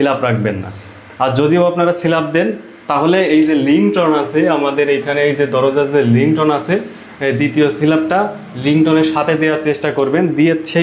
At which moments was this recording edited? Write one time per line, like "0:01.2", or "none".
none

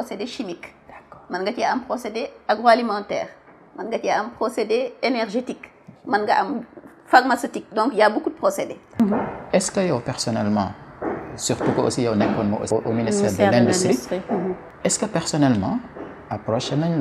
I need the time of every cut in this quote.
0:08.9
0:12.7
0:14.7

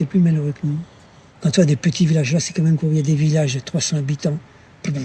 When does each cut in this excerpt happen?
0:01.2

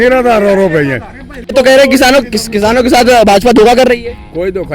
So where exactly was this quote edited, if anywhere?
0:01.5

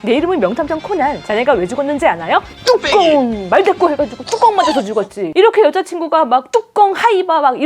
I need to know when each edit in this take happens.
none

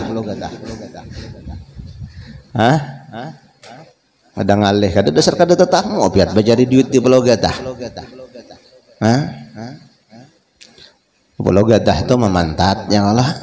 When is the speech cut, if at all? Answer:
none

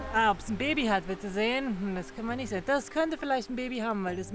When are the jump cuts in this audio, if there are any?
none

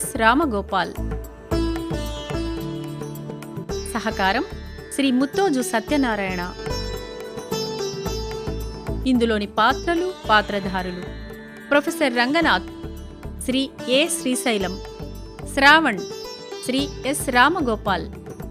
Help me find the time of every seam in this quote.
0:01.1
0:03.6
0:06.5
0:09.0

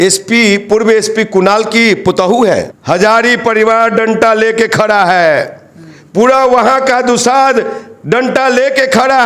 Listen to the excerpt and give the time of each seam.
0:02.7

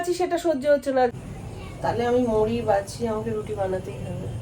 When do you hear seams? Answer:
0:01.1

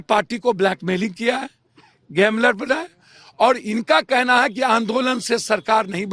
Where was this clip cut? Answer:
none

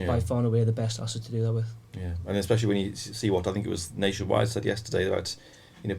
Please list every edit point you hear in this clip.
none

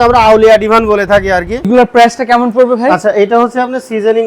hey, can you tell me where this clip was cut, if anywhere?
0:01.7

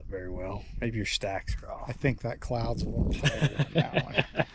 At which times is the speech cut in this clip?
none

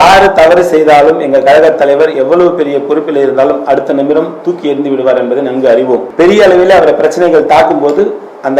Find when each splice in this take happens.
0:06.1

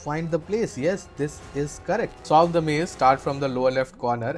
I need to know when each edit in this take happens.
0:02.2

